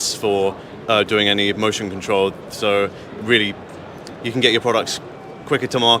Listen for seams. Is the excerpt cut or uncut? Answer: uncut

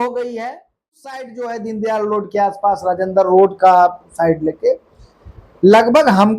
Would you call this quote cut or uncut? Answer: cut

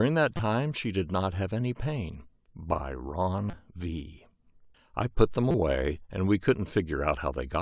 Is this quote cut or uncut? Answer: cut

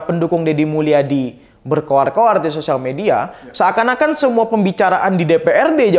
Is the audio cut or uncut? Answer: uncut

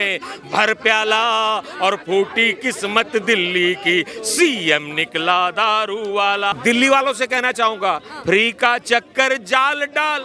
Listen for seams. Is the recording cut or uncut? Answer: cut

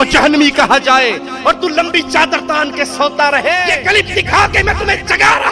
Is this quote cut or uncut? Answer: cut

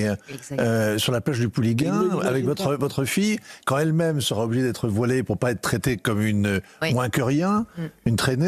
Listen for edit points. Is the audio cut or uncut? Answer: uncut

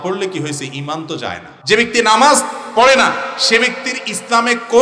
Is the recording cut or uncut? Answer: cut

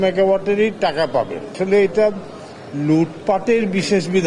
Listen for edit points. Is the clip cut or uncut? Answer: cut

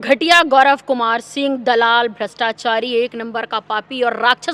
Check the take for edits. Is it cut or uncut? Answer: uncut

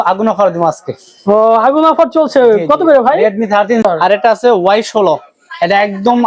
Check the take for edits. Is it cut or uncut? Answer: cut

